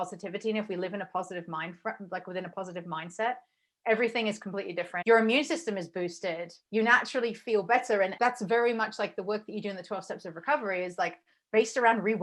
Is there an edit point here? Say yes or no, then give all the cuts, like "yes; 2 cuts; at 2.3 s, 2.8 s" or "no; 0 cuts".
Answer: yes; 3 cuts; at 5.0 s, 6.5 s, 8.1 s